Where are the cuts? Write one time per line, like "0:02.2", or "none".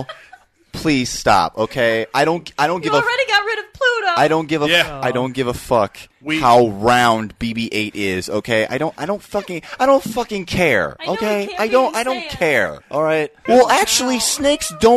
0:13.4